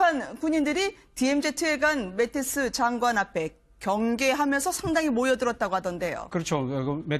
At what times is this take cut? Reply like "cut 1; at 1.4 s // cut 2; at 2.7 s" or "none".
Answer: none